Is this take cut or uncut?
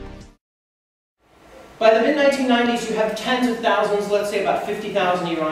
uncut